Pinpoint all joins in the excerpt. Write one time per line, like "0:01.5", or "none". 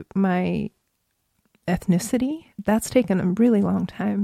0:02.6